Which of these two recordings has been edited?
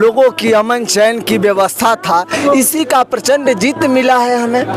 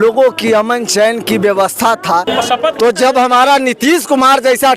second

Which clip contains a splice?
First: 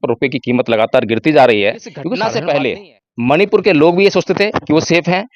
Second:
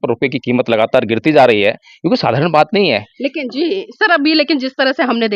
first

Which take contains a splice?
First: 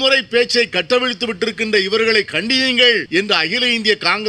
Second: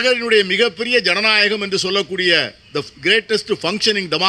first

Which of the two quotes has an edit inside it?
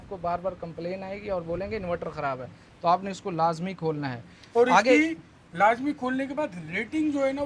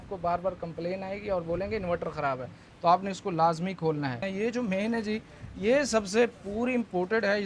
second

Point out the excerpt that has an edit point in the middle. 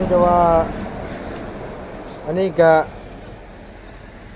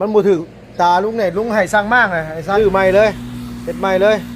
second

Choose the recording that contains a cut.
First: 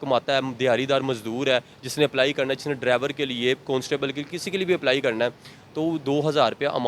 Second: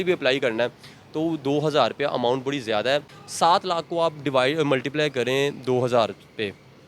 second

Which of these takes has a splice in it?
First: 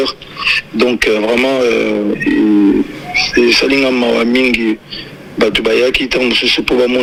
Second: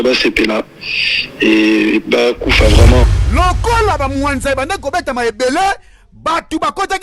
second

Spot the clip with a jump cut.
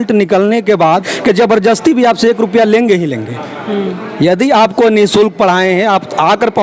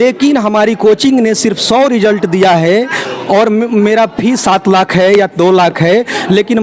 first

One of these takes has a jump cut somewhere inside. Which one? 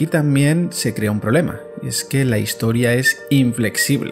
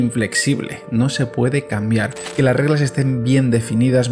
second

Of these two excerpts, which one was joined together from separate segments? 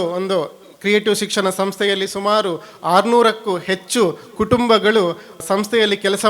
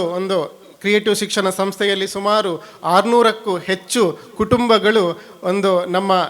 first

